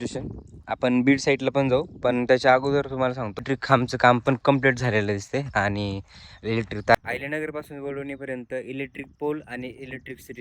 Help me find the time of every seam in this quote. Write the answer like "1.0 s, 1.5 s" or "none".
3.4 s, 7.0 s